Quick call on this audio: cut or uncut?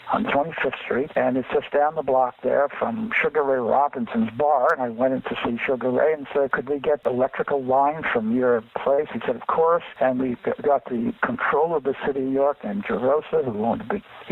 cut